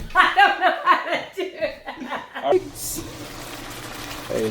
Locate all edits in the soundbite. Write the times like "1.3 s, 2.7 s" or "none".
2.5 s

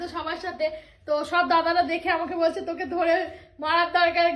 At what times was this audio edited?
none

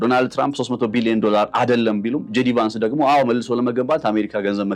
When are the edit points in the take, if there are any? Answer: none

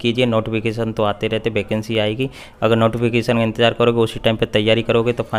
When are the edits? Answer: none

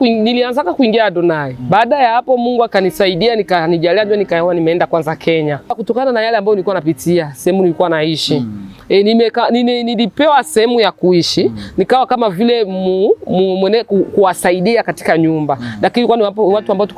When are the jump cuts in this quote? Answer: 5.8 s

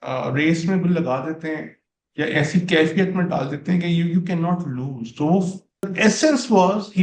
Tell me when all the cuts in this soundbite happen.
5.9 s

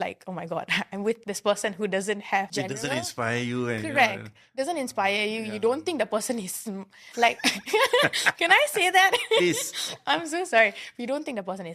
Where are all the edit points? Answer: 1.2 s, 2.5 s

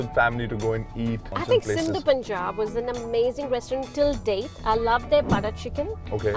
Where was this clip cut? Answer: 1.3 s

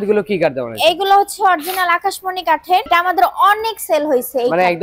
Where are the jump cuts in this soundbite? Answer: 2.9 s

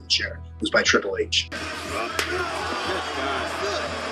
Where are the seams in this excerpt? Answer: none

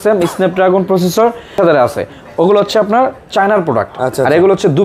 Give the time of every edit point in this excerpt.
1.6 s

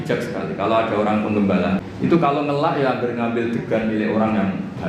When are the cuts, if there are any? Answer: 1.8 s

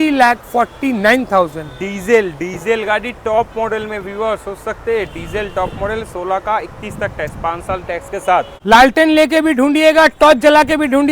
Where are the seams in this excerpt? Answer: 8.5 s

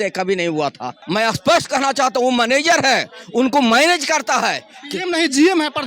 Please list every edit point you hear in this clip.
0.9 s

